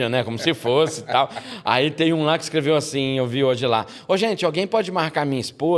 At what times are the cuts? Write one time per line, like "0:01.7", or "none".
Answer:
none